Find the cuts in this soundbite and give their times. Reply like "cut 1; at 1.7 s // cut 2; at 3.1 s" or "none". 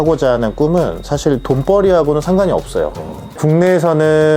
cut 1; at 3.4 s